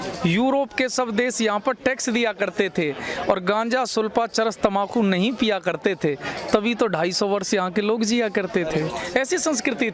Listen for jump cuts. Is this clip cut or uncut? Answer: uncut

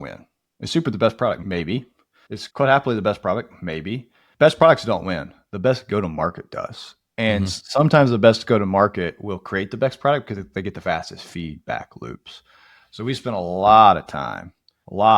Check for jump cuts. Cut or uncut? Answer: cut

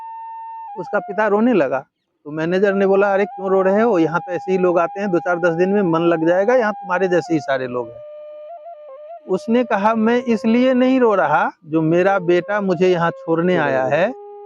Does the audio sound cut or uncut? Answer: uncut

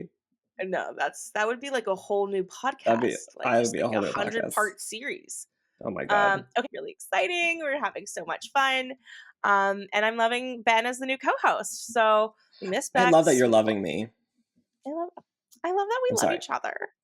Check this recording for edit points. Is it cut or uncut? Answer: cut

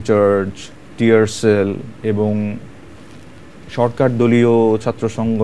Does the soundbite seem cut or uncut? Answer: uncut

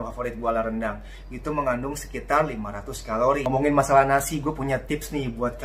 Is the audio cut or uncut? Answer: cut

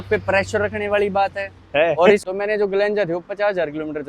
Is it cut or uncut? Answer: cut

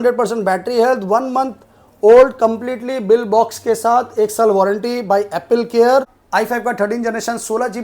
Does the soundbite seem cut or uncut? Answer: cut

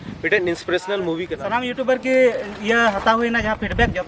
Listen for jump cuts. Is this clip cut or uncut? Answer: cut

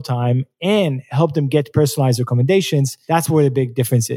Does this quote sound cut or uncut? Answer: cut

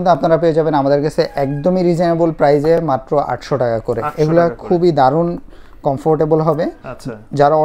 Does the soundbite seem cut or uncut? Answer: uncut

